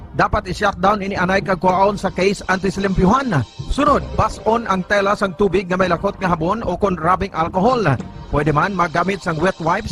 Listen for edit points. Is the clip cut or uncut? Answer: uncut